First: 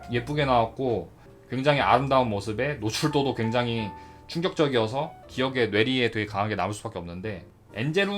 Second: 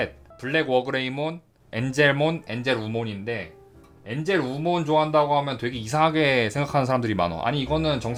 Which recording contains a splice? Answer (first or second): first